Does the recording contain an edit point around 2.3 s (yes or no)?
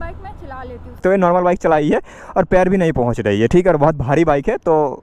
no